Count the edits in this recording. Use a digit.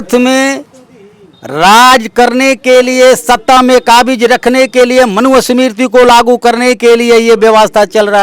0